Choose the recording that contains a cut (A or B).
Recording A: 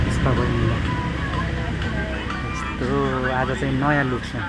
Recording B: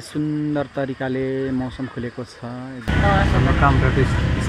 B